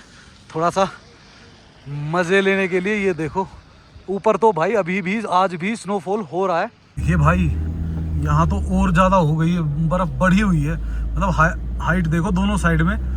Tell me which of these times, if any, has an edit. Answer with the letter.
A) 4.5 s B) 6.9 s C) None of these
B